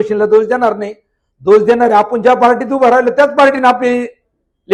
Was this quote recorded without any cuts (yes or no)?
yes